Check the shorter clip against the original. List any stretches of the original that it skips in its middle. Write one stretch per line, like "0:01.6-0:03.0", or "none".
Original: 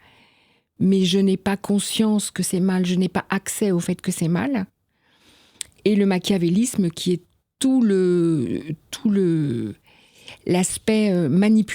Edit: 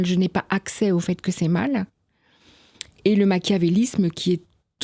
none